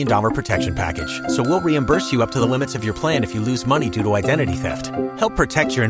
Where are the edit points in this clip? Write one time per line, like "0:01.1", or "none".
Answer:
none